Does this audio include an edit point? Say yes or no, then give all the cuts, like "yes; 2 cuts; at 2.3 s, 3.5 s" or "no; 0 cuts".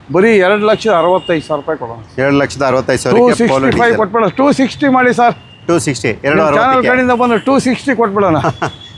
no; 0 cuts